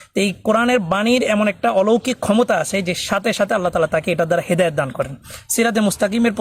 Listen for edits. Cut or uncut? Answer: uncut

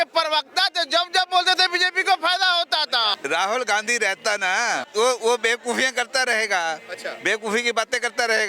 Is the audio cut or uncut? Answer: cut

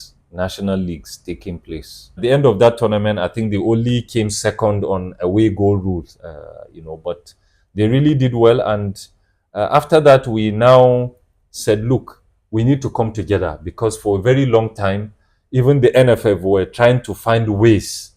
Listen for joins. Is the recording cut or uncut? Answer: cut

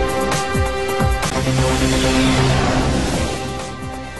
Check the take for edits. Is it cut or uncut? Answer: cut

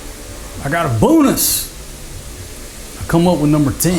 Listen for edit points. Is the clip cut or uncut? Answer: uncut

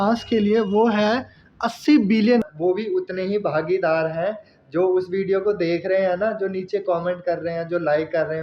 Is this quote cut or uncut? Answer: cut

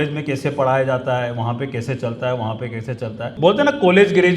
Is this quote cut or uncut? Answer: cut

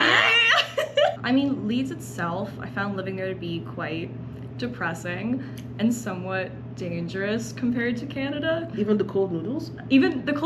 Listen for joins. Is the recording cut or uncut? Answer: cut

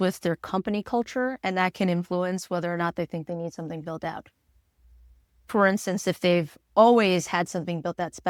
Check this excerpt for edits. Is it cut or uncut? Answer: uncut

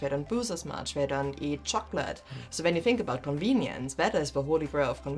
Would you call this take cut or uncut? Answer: uncut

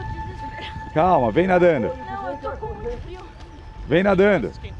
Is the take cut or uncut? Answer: uncut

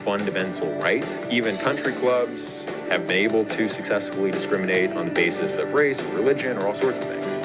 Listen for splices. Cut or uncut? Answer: uncut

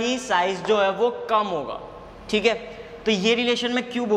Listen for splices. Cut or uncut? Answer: uncut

